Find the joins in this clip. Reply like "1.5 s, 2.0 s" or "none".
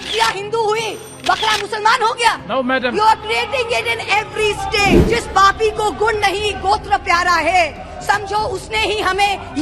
5.0 s